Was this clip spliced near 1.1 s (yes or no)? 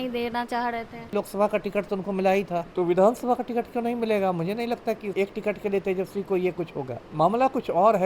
yes